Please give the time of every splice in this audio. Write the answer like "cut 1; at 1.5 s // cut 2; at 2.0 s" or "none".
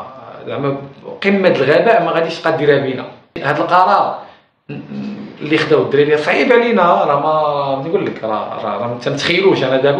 cut 1; at 3.3 s